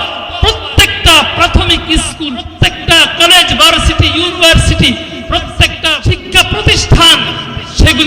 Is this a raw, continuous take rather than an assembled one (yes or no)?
no